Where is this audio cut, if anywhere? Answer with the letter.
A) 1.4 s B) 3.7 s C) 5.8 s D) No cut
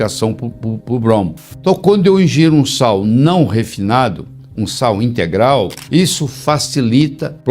A